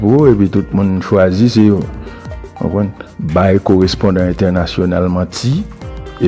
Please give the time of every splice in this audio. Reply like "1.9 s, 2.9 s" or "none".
none